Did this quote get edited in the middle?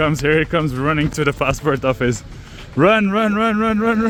no; 0 cuts

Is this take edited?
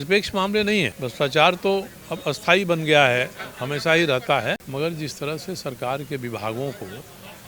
yes; 2 cuts; at 1.0 s, 4.6 s

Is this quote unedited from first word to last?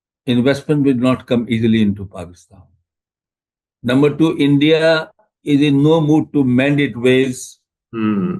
yes; 0 cuts

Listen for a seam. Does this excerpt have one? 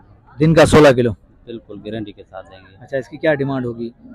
no; 0 cuts

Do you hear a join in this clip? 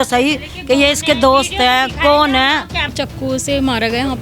yes; 1 cut; at 2.8 s

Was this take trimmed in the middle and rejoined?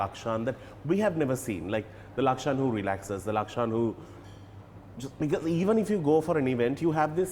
no; 0 cuts

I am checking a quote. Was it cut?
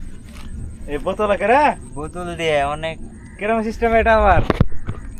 no; 0 cuts

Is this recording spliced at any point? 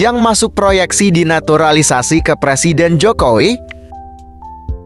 yes; 1 cut; at 4.0 s

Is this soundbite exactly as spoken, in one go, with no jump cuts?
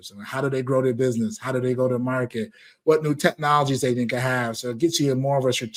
yes; 0 cuts

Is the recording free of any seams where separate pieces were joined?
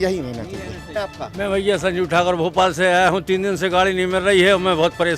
no; 1 cut; at 0.9 s

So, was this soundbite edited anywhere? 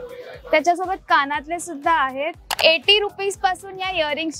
yes; 1 cut; at 2.4 s

